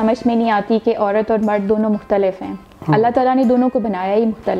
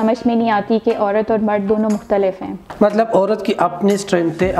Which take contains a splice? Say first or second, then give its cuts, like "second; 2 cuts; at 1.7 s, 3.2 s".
second; 1 cut; at 2.6 s